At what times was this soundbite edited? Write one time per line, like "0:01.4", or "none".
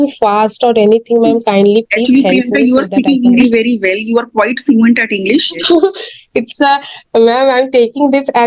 0:05.6